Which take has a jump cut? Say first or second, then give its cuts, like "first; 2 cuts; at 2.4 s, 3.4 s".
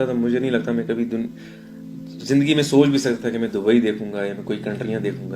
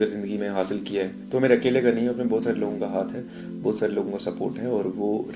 second; 1 cut; at 1.2 s